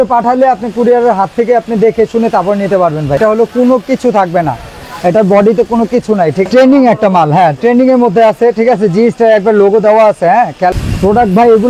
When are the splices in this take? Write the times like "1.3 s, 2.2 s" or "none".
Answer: 3.2 s, 6.4 s, 10.7 s

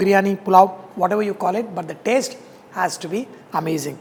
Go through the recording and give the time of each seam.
none

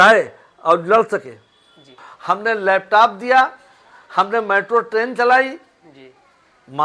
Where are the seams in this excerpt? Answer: 2.1 s

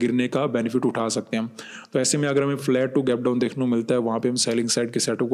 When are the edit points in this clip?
2.6 s

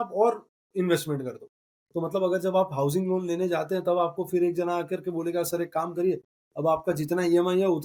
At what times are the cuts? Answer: none

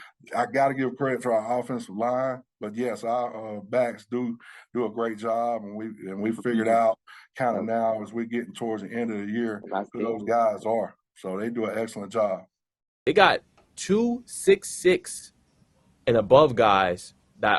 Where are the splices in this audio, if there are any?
13.0 s

